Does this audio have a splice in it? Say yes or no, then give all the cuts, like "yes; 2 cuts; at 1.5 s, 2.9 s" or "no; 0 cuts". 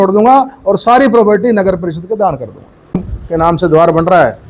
yes; 1 cut; at 3.0 s